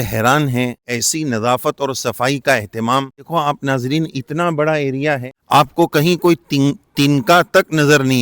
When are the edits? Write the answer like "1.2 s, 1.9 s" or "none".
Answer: 0.9 s, 3.3 s, 5.3 s